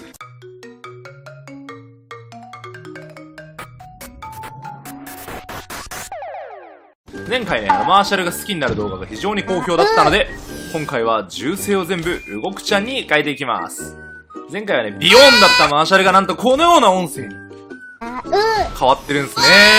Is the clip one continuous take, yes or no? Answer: no